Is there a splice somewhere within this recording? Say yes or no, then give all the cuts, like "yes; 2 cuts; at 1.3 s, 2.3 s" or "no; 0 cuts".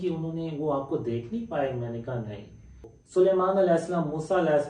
yes; 1 cut; at 2.9 s